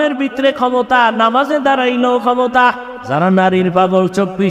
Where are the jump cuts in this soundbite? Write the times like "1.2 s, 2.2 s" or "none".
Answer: 2.9 s